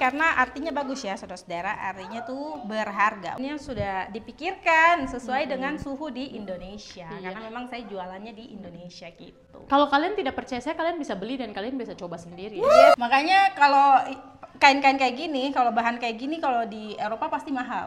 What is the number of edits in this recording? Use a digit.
2